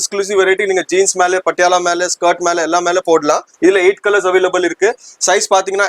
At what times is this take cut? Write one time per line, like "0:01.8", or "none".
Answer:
0:03.5